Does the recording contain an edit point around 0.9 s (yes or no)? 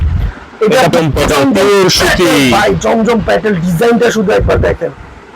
yes